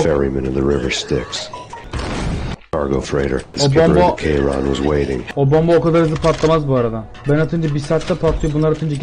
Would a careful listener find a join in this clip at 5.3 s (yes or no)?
yes